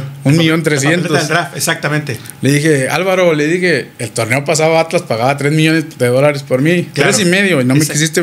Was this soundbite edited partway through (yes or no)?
no